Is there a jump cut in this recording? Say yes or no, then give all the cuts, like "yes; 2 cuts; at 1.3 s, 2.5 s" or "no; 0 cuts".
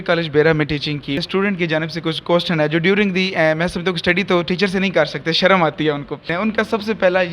yes; 2 cuts; at 1.2 s, 6.2 s